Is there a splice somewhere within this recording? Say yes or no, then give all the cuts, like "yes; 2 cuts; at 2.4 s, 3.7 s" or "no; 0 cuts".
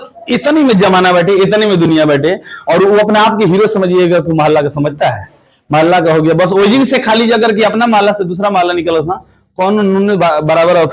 no; 0 cuts